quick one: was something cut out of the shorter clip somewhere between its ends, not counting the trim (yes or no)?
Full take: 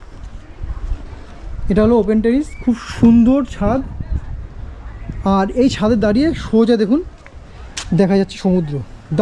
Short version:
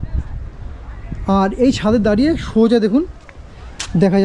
no